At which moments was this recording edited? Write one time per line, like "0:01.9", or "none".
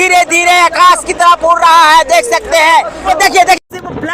0:03.1